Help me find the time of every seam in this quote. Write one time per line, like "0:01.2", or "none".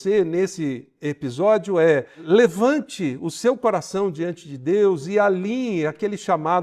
0:02.2